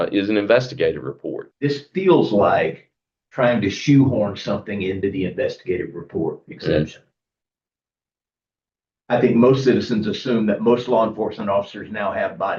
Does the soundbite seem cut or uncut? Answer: cut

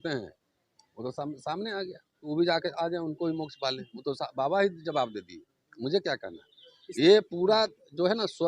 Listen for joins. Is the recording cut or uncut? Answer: cut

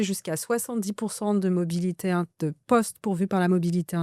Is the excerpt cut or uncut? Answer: uncut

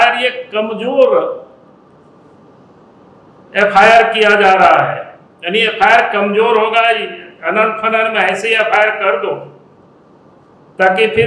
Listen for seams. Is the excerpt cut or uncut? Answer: uncut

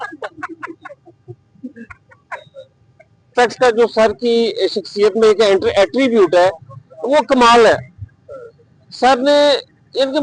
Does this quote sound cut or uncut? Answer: cut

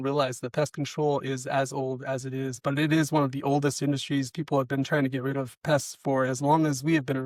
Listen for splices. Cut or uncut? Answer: uncut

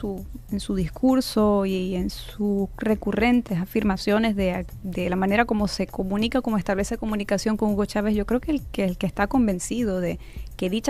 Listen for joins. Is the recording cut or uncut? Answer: uncut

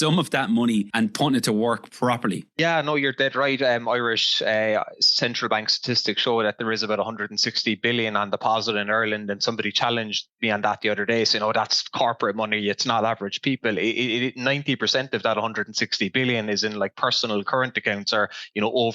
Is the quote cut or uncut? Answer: cut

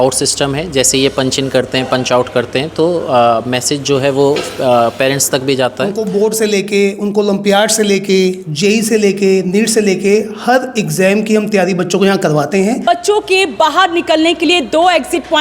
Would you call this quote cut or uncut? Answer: cut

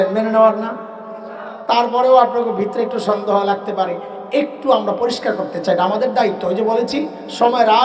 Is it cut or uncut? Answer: uncut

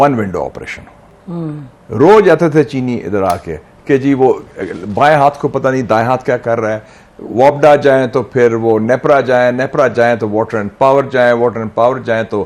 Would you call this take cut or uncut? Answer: uncut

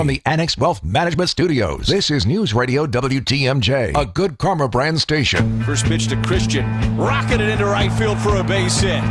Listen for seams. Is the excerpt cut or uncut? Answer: cut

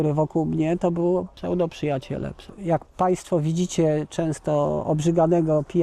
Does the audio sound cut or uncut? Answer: cut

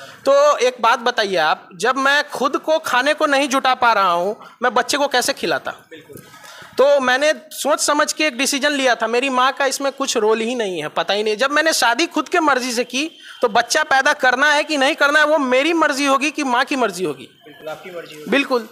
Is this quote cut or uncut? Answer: uncut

